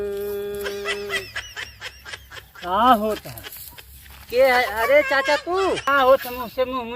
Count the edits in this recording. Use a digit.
1